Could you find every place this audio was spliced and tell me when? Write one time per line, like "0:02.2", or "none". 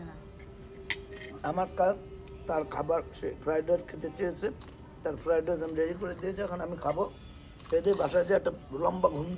none